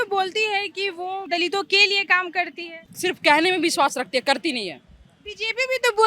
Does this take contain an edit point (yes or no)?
yes